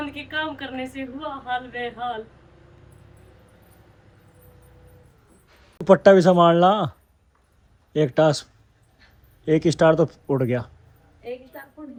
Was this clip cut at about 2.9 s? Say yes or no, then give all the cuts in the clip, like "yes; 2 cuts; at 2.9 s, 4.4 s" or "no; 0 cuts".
no; 0 cuts